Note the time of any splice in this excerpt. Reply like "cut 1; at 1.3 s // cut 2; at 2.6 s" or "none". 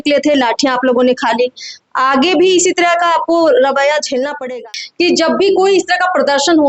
cut 1; at 4.5 s